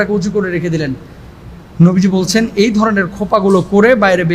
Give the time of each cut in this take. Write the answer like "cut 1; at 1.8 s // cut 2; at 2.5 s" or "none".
none